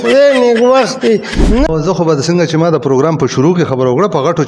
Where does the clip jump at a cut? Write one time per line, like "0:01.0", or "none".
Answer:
0:01.7